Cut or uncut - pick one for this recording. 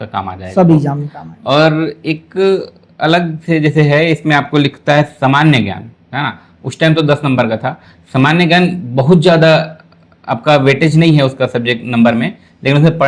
uncut